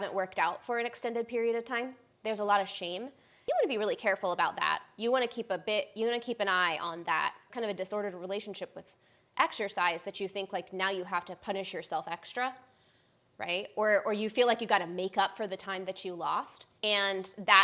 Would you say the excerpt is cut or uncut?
cut